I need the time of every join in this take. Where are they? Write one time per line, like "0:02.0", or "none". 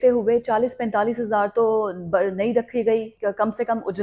0:03.1